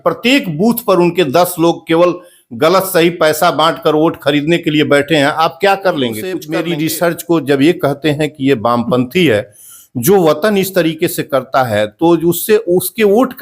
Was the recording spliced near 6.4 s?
yes; 1 cut; at 6.4 s

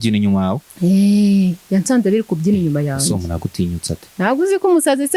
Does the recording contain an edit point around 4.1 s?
yes; 1 cut; at 4.1 s

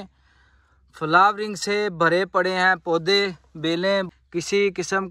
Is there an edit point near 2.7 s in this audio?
no; 1 cut; at 4.1 s

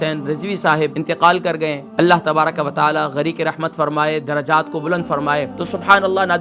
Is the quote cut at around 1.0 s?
yes; 3 cuts; at 1.0 s, 1.8 s, 5.6 s

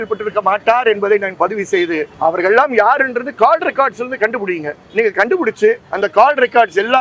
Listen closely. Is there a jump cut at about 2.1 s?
yes; 3 cuts; at 2.1 s, 4.8 s, 5.9 s

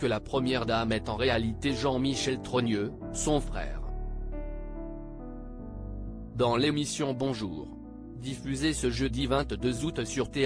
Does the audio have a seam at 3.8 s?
yes; 2 cuts; at 3.8 s, 6.3 s

